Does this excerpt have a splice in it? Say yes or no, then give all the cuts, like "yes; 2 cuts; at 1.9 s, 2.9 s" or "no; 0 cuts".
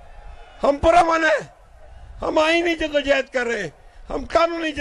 no; 0 cuts